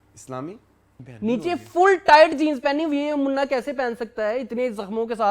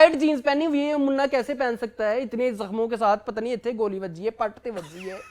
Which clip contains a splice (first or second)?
first